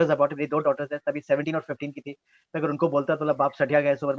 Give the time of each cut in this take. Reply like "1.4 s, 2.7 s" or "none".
none